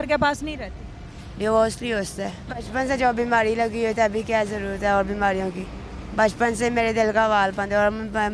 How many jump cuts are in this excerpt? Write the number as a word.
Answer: one